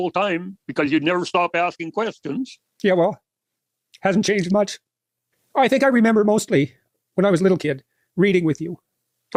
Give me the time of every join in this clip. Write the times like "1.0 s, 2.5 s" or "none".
none